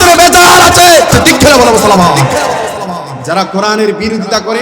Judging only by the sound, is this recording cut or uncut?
cut